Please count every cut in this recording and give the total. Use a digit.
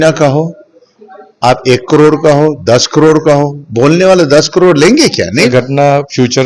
1